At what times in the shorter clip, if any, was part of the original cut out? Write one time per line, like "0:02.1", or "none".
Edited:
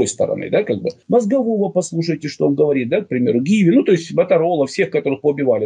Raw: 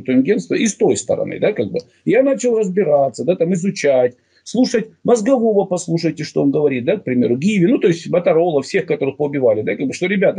0:01.0

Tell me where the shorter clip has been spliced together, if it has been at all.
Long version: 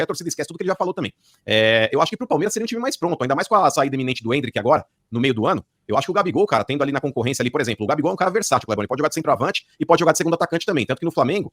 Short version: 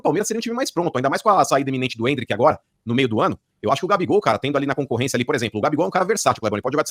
none

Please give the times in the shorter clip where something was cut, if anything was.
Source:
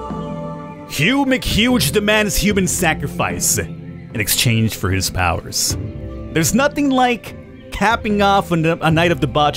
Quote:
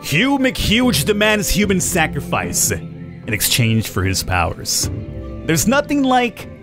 none

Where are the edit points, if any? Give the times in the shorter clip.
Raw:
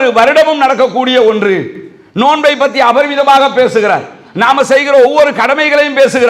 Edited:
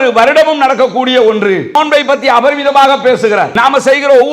0:01.7
0:03.5

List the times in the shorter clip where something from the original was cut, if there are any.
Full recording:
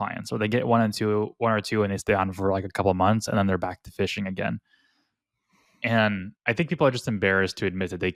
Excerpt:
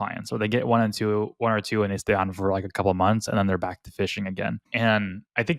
0:04.6

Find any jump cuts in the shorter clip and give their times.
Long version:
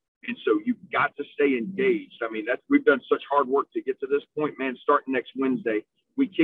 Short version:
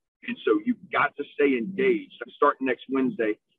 0:02.2

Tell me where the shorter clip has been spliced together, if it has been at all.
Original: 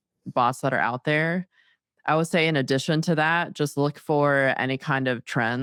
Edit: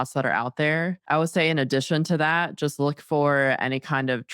0:01.0

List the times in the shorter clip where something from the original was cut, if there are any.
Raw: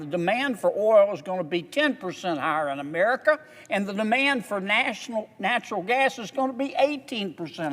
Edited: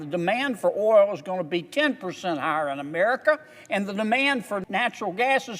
0:04.6

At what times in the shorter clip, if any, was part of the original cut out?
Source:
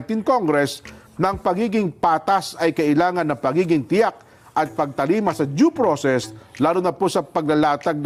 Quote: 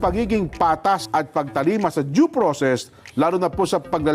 0:01.0

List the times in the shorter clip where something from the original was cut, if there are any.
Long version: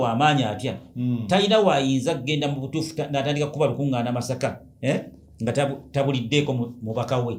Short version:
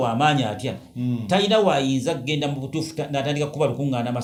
none

